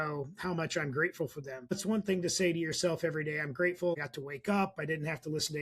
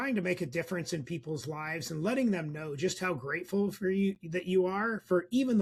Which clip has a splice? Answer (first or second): first